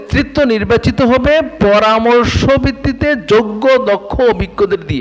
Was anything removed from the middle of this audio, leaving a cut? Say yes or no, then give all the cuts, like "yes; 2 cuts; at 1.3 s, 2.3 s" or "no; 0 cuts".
no; 0 cuts